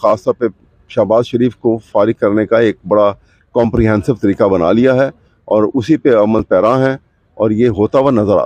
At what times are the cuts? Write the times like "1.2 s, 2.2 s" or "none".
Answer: none